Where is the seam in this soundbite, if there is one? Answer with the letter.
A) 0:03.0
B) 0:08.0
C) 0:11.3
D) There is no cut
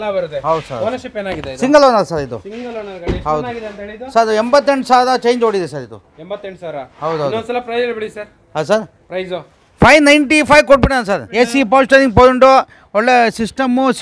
C